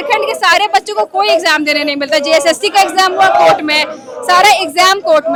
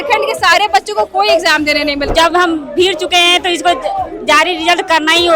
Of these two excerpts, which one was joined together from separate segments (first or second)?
second